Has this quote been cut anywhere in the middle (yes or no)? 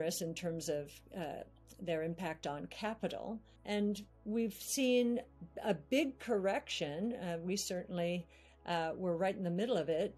yes